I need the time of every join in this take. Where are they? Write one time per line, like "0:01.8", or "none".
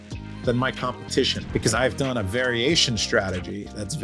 0:01.8